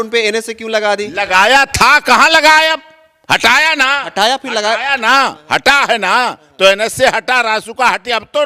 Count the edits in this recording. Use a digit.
0